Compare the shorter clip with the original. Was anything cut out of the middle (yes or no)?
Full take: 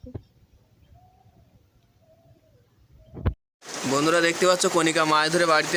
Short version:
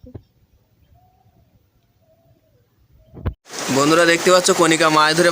yes